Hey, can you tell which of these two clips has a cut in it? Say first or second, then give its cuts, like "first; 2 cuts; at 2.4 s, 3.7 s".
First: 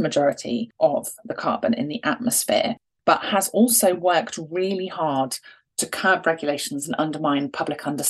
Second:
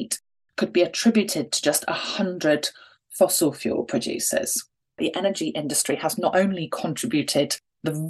second; 1 cut; at 5.0 s